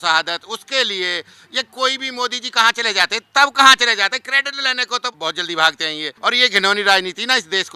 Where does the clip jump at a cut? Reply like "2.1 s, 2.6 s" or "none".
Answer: 5.1 s, 6.1 s